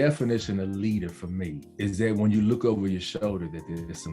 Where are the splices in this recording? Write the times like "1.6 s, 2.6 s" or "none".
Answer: 1.6 s